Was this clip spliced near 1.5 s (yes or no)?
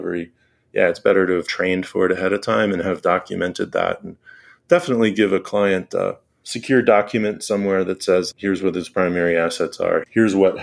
yes